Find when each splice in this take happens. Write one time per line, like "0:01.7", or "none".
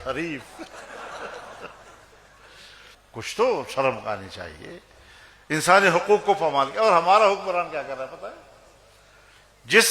0:03.0